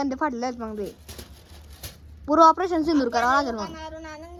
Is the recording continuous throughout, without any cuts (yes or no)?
yes